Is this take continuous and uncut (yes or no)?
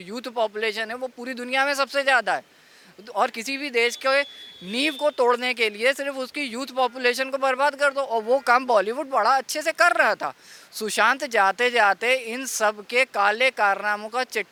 yes